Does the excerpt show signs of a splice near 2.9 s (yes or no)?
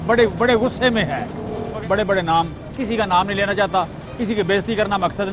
no